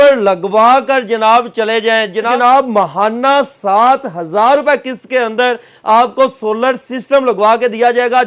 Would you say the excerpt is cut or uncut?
cut